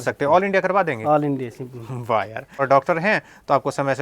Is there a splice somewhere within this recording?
yes; 1 cut; at 2.6 s

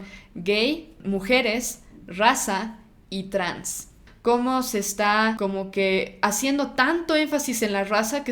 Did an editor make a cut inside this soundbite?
yes; 3 cuts; at 0.9 s, 4.0 s, 5.4 s

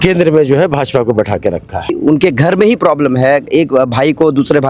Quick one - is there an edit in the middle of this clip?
yes; 1 cut; at 2.0 s

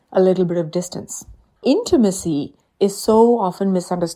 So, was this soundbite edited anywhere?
yes; 1 cut; at 1.6 s

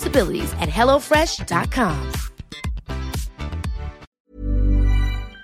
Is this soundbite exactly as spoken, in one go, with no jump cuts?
no; 1 cut; at 4.1 s

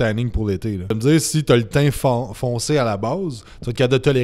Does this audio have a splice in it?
yes; 1 cut; at 0.9 s

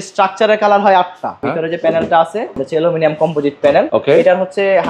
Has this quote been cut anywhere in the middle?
yes; 3 cuts; at 1.5 s, 2.6 s, 3.9 s

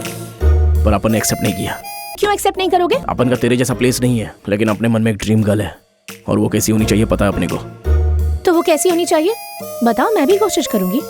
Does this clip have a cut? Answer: yes; 3 cuts; at 2.2 s, 3.0 s, 4.3 s

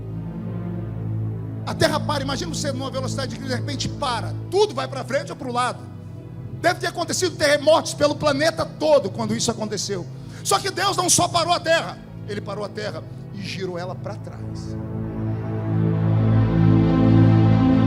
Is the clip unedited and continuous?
yes; 0 cuts

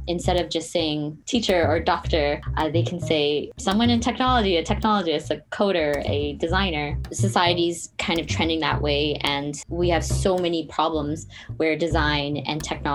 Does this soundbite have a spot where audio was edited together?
yes; 4 cuts; at 1.2 s, 2.5 s, 3.5 s, 7.0 s

